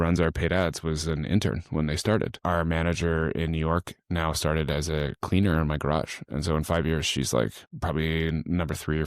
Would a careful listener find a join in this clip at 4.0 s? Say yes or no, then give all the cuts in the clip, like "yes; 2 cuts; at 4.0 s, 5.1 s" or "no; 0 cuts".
no; 2 cuts; at 2.4 s, 7.7 s